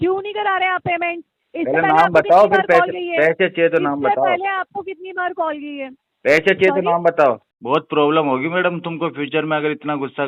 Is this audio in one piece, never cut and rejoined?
no; 1 cut; at 7.5 s

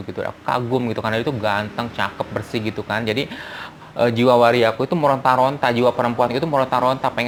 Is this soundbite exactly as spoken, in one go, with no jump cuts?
yes; 0 cuts

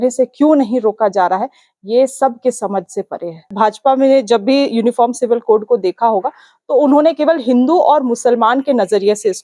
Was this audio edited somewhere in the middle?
yes; 1 cut; at 3.5 s

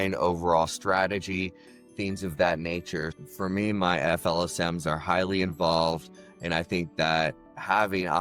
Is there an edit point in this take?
yes; 1 cut; at 3.1 s

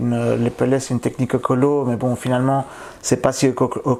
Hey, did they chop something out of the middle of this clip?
no; 0 cuts

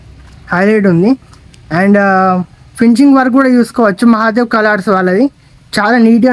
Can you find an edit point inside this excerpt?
no; 0 cuts

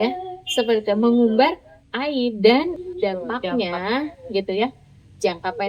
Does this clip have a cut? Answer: yes; 1 cut; at 2.8 s

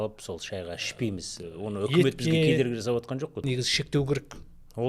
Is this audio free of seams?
no; 1 cut; at 3.5 s

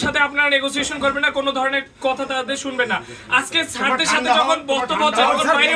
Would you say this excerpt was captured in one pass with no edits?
yes; 0 cuts

